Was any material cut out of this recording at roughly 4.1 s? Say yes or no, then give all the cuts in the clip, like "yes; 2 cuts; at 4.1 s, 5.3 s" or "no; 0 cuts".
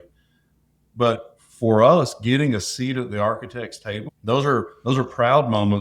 yes; 1 cut; at 4.1 s